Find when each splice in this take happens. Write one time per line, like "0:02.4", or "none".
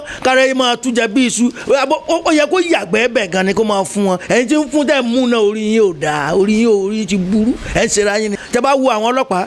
0:08.4